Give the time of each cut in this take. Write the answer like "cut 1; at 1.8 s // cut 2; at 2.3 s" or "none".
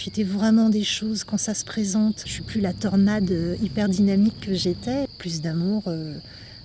cut 1; at 2.3 s // cut 2; at 5.2 s